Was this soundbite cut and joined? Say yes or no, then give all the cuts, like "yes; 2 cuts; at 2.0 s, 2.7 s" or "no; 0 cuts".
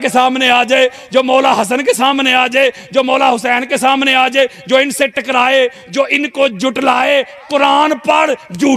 no; 0 cuts